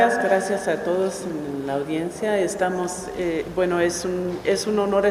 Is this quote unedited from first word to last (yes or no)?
yes